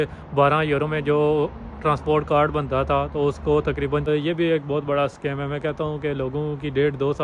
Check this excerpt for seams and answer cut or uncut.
cut